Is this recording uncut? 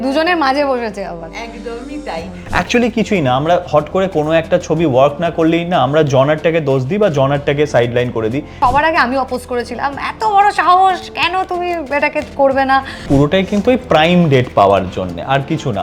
no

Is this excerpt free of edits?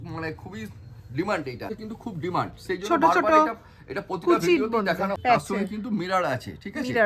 no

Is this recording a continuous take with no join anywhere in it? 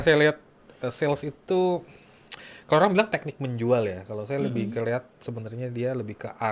yes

